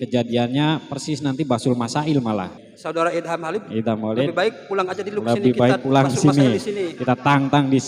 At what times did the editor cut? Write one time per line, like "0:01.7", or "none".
0:02.6